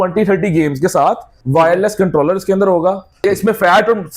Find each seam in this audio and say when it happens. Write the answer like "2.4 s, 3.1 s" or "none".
1.3 s, 3.2 s